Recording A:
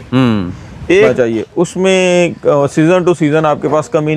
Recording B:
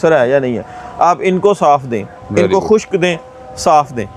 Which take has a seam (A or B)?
A